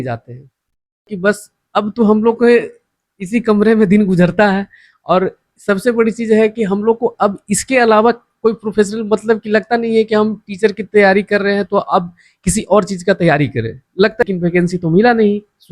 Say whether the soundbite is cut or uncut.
cut